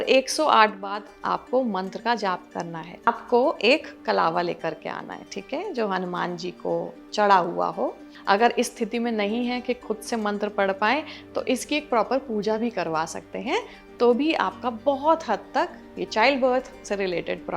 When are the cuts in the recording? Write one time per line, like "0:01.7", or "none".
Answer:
0:03.1
0:08.1